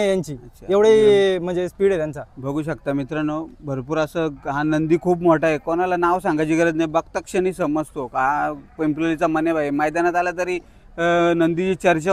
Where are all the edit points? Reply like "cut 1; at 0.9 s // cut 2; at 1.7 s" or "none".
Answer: none